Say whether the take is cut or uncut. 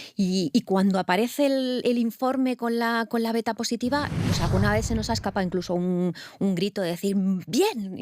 cut